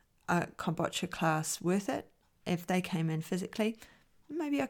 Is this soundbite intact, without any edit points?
yes; 0 cuts

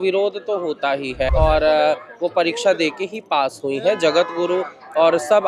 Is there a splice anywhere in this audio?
yes; 1 cut; at 1.3 s

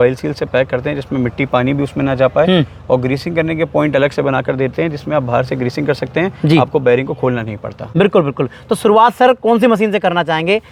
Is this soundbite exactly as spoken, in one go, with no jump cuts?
yes; 0 cuts

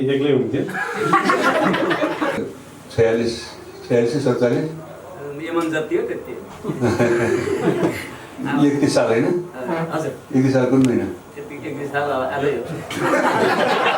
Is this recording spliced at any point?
yes; 1 cut; at 2.4 s

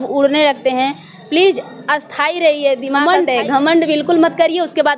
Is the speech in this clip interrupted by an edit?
yes; 1 cut; at 2.9 s

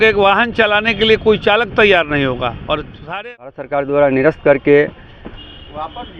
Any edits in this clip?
yes; 1 cut; at 3.1 s

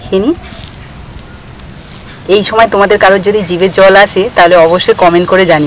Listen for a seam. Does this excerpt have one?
no; 0 cuts

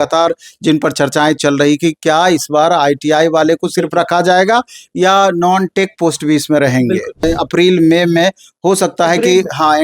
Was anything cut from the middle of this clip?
yes; 1 cut; at 7.2 s

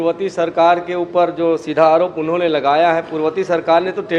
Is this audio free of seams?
yes; 0 cuts

